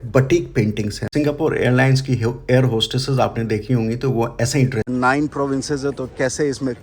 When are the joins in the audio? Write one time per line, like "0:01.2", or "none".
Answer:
0:01.0
0:04.9